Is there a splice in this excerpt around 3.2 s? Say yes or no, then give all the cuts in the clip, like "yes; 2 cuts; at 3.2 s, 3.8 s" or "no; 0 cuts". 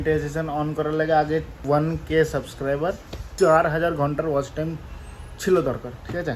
yes; 2 cuts; at 1.6 s, 3.2 s